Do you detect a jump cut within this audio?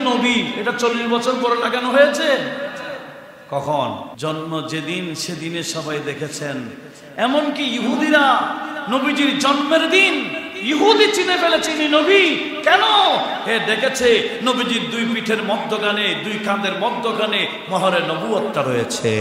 yes; 1 cut; at 4.1 s

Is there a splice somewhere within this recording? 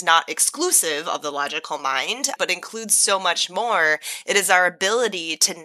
yes; 1 cut; at 2.3 s

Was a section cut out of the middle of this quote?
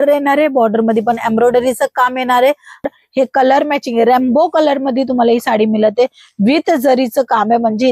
yes; 1 cut; at 3.0 s

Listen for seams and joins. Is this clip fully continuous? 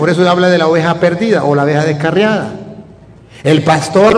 yes; 0 cuts

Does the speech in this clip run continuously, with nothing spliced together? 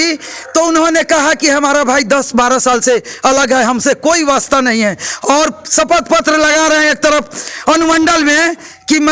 yes; 0 cuts

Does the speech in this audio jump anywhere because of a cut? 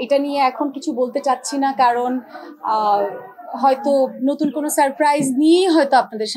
no; 0 cuts

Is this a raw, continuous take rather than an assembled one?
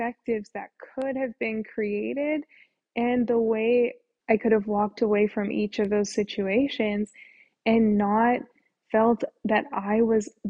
no; 1 cut; at 4.1 s

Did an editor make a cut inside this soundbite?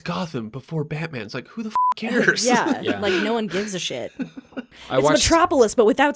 yes; 1 cut; at 4.7 s

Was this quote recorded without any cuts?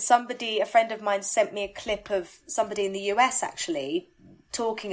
yes; 0 cuts

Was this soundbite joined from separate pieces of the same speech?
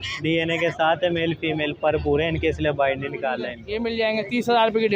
yes; 1 cut; at 3.6 s

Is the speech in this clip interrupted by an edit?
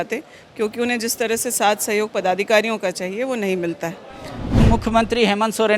yes; 1 cut; at 4.6 s

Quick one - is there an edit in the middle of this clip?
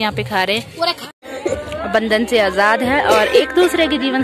yes; 1 cut; at 1.1 s

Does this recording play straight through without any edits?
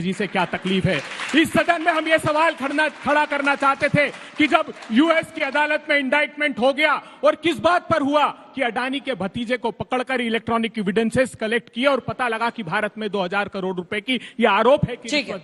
yes; 0 cuts

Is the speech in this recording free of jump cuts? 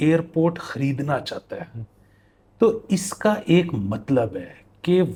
yes; 0 cuts

